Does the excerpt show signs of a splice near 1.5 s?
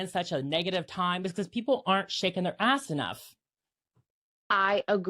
no; 0 cuts

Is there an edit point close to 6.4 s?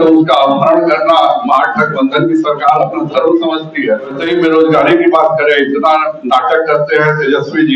no; 1 cut; at 4.2 s

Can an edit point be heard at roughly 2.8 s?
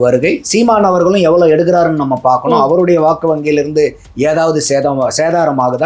no; 1 cut; at 4.0 s

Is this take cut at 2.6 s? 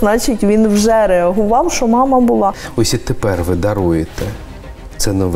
yes; 1 cut; at 2.6 s

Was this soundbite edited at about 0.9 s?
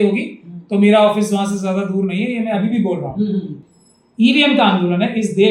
no; 1 cut; at 3.6 s

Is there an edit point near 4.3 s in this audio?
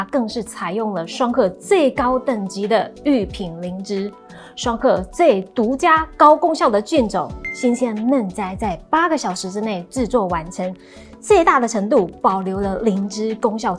no; 0 cuts

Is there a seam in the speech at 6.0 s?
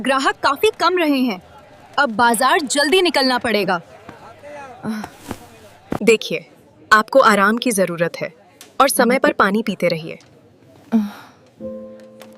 yes; 1 cut; at 6.0 s

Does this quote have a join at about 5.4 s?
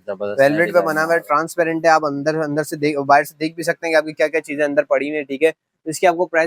no; 0 cuts

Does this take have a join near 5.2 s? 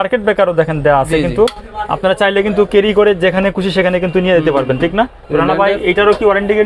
yes; 1 cut; at 5.2 s

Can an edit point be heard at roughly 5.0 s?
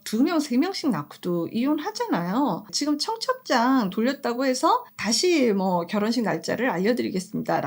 yes; 2 cuts; at 2.8 s, 5.0 s

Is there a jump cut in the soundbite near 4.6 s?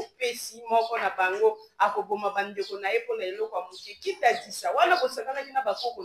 no; 0 cuts

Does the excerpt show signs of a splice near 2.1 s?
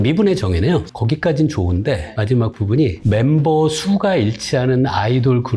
yes; 2 cuts; at 0.9 s, 2.1 s

